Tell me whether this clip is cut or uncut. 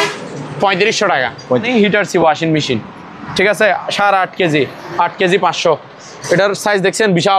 cut